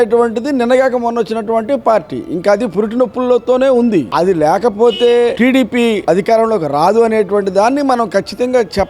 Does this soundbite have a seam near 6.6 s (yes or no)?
no